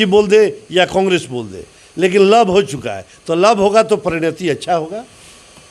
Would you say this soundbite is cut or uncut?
uncut